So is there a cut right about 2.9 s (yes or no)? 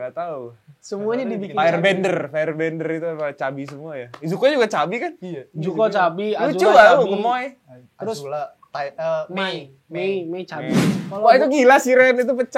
no